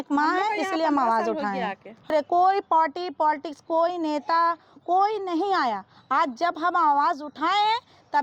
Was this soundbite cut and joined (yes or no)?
yes